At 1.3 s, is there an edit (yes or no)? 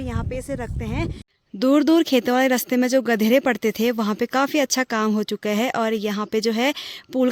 yes